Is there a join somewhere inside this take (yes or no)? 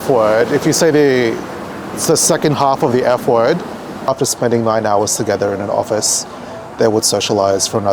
yes